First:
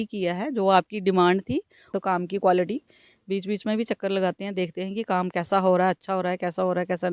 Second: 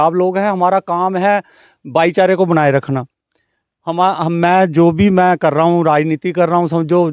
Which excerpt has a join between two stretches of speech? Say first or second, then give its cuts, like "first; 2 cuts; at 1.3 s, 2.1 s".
first; 1 cut; at 1.9 s